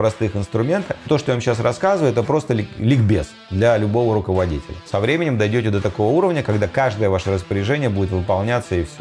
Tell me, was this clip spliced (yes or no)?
yes